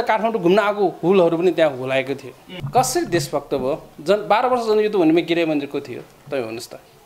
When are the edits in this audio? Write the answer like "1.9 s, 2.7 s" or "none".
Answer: 2.5 s